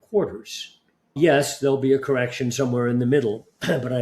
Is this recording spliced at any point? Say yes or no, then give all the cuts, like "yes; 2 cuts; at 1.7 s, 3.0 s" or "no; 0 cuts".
yes; 1 cut; at 1.2 s